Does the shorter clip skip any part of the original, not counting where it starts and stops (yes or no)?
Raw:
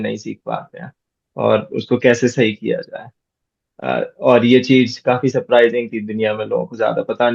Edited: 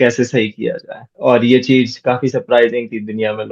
yes